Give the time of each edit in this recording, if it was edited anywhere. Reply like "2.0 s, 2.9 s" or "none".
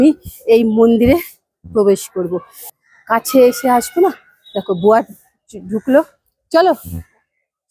2.6 s